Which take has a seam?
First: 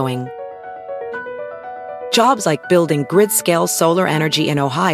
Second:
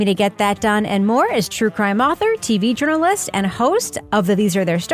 second; 1 cut; at 4.0 s

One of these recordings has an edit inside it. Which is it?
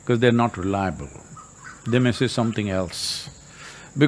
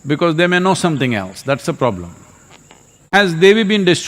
second; 1 cut; at 3.0 s

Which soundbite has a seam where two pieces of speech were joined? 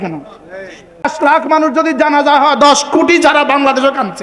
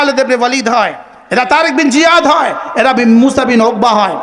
first; 1 cut; at 1.1 s

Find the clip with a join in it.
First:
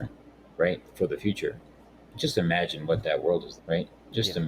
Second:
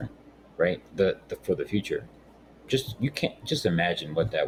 first; 2 cuts; at 0.9 s, 2.1 s

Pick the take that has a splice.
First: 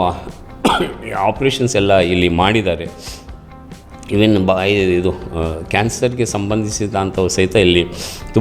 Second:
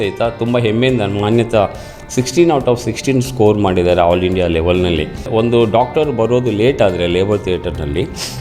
second; 1 cut; at 5.3 s

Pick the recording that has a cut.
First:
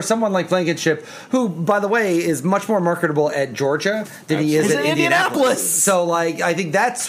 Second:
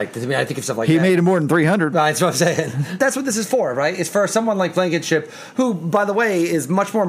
second; 1 cut; at 3.0 s

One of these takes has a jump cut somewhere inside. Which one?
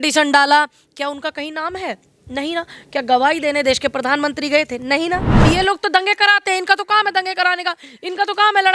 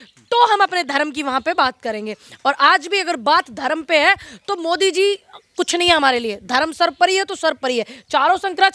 first; 1 cut; at 5.4 s

